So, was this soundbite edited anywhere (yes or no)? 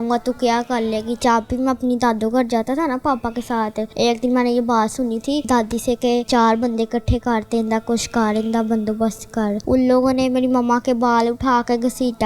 yes